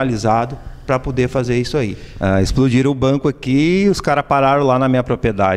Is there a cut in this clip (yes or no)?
yes